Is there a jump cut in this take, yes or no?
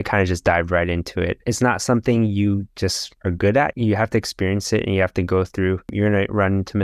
yes